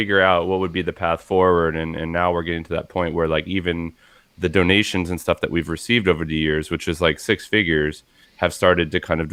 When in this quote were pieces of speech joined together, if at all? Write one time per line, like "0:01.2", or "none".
none